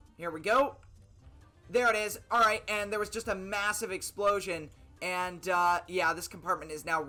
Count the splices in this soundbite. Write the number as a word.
zero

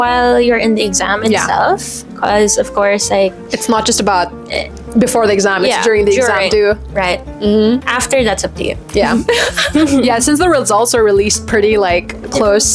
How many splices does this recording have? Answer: zero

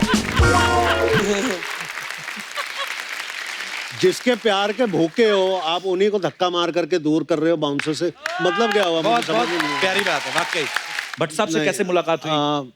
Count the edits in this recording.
one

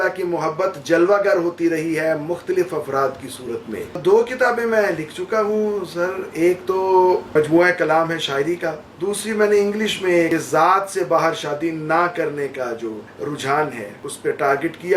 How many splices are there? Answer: six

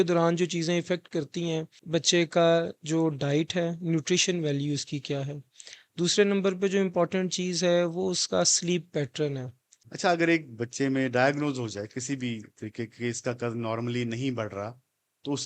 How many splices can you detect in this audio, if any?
two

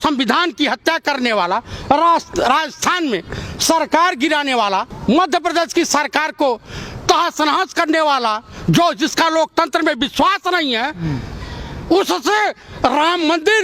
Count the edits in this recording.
one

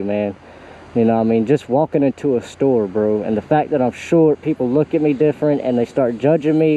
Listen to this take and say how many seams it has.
zero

